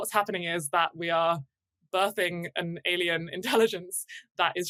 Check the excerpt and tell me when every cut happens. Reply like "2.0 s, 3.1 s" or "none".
none